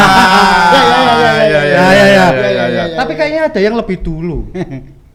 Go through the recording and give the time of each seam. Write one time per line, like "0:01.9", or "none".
none